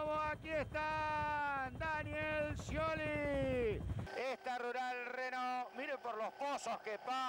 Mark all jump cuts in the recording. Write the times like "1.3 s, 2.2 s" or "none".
4.0 s